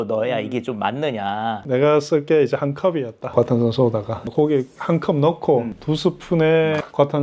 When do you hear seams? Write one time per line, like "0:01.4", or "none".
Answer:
0:01.6
0:04.3